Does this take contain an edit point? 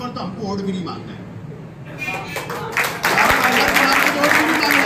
no; 0 cuts

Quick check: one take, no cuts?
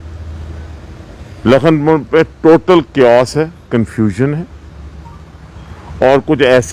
yes; 0 cuts

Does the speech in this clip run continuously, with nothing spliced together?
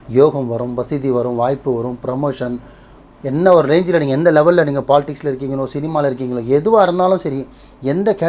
yes; 0 cuts

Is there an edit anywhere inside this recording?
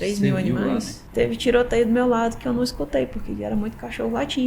yes; 1 cut; at 1.0 s

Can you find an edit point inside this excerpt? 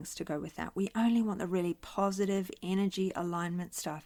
no; 0 cuts

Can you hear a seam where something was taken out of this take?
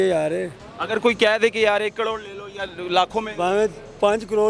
no; 0 cuts

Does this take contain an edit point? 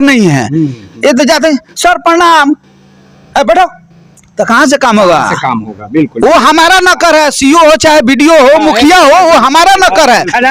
no; 0 cuts

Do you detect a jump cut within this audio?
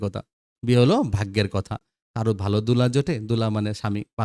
no; 0 cuts

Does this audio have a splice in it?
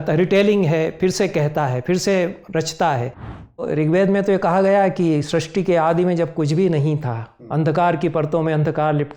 yes; 1 cut; at 3.6 s

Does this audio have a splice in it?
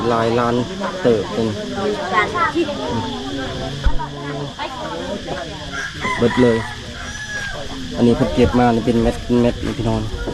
no; 0 cuts

